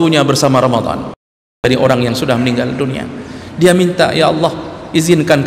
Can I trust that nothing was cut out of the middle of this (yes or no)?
no